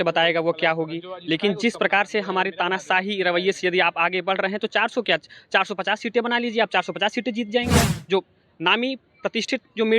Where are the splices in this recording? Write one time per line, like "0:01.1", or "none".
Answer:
0:08.0